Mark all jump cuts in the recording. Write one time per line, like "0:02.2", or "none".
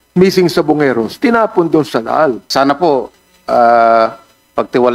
0:02.5